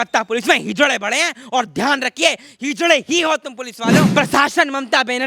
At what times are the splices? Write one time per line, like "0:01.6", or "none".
0:04.1